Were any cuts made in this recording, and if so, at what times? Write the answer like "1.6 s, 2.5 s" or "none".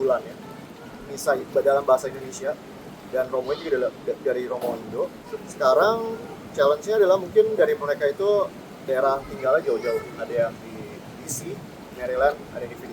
5.3 s

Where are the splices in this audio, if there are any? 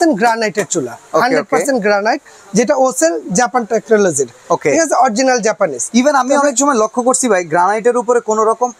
none

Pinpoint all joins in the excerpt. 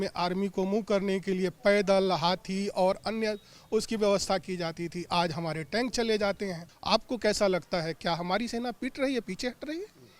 6.7 s

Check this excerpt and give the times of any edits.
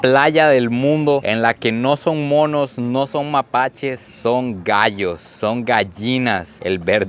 none

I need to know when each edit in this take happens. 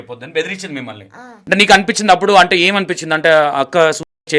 1.3 s

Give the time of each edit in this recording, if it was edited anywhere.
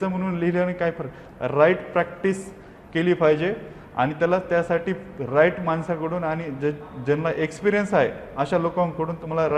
none

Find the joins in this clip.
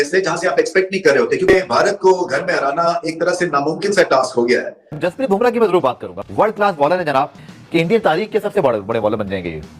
5.0 s, 7.5 s

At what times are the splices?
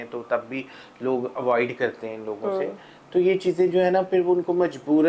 none

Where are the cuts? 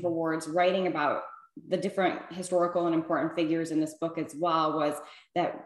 none

